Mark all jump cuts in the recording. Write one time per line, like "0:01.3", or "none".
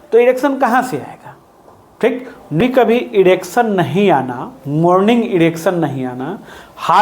0:02.4